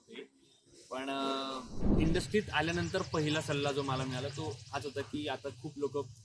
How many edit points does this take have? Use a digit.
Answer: 1